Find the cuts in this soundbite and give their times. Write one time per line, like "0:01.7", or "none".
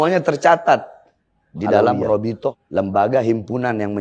0:02.6